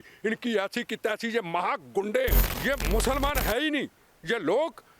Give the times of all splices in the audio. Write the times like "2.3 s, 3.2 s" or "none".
2.5 s